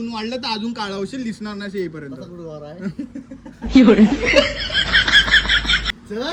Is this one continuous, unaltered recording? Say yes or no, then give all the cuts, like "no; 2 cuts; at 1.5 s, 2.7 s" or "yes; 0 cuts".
yes; 0 cuts